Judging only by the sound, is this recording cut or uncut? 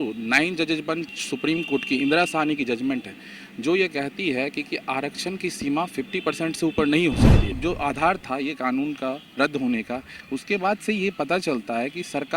cut